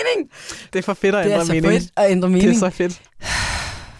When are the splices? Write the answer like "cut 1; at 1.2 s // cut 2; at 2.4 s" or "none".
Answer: cut 1; at 3.1 s